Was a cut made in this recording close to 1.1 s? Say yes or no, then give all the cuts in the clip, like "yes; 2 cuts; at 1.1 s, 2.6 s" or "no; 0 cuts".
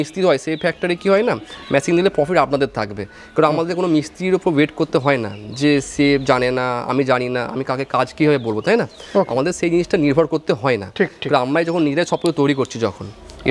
no; 0 cuts